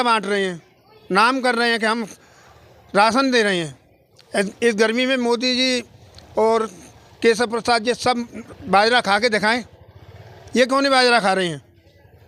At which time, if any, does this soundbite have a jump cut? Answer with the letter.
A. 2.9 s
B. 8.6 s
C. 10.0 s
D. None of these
D